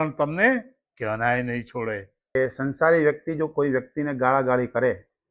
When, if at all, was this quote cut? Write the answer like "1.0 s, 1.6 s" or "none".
2.3 s